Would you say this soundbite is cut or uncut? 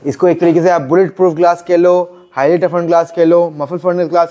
uncut